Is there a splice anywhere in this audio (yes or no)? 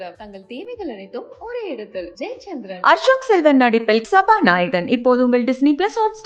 no